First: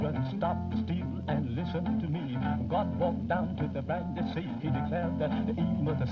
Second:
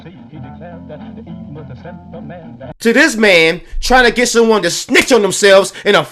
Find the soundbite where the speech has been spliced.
second; 1 cut; at 2.7 s

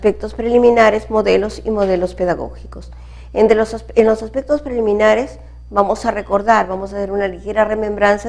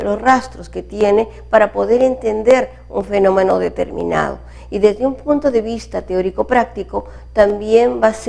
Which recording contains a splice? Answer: first; 1 cut; at 1.0 s

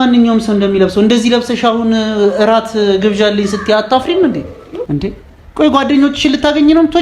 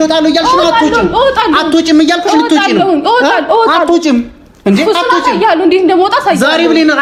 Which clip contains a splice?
first; 1 cut; at 4.7 s

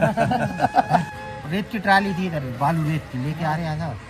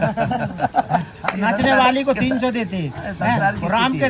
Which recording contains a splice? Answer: first; 1 cut; at 1.1 s

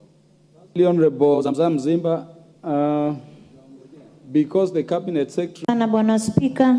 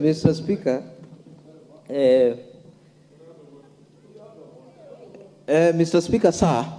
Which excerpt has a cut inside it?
first; 1 cut; at 5.7 s

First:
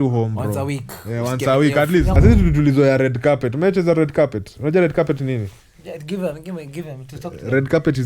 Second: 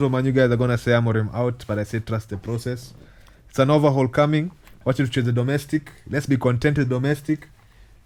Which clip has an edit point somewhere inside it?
first; 1 cut; at 2.2 s

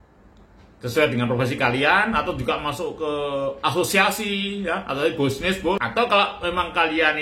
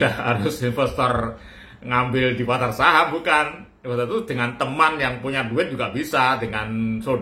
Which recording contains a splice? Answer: first; 1 cut; at 5.8 s

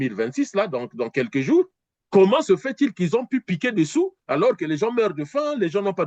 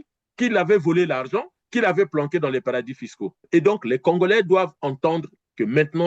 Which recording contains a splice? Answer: second; 1 cut; at 3.4 s

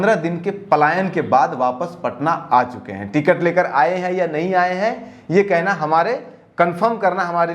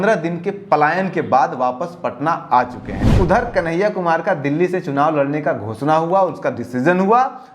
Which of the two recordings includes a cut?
second; 1 cut; at 3.1 s

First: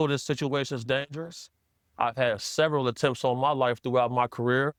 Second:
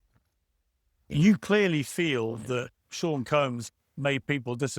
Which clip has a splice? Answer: second; 2 cuts; at 2.8 s, 3.6 s

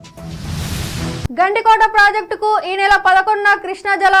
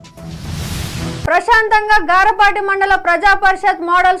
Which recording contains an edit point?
second; 1 cut; at 1.3 s

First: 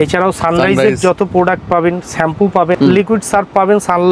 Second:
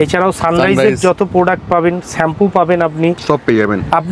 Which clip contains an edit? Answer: first; 1 cut; at 2.8 s

